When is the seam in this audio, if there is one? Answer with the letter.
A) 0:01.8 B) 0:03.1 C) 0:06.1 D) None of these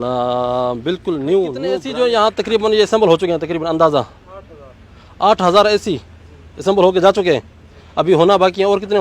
A